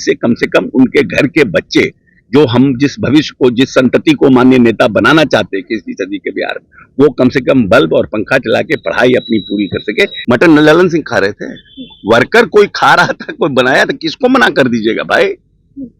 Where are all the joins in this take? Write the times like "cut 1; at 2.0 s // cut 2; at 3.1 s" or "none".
cut 1; at 10.2 s